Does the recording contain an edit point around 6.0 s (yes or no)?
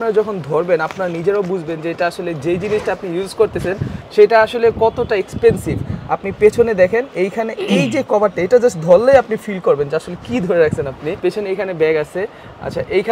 no